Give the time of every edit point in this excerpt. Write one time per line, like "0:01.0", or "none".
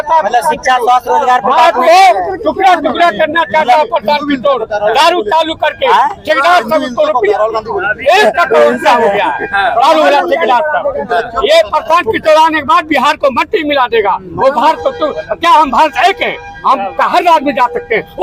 none